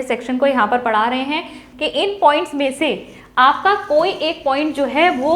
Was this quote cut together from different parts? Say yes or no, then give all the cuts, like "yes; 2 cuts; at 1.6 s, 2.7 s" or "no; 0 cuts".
yes; 1 cut; at 1.6 s